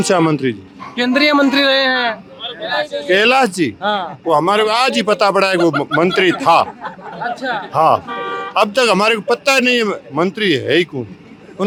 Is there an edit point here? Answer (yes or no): no